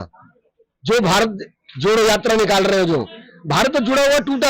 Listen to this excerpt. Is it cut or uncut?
uncut